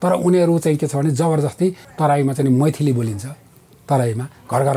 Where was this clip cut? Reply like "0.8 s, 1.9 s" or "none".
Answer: 1.9 s